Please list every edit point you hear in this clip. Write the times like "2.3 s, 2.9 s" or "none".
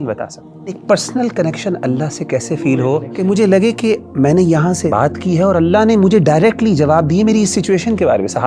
0.8 s, 3.1 s, 4.9 s